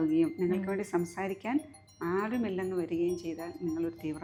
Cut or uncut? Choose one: uncut